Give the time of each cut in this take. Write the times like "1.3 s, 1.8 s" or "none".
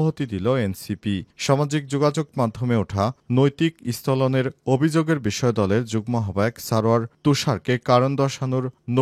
none